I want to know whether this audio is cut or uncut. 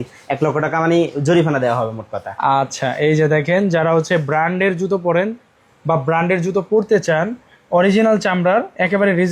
uncut